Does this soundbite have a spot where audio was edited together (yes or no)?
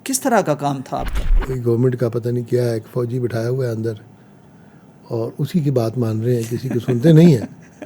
yes